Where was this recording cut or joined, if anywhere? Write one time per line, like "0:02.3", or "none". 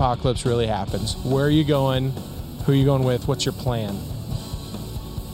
0:01.1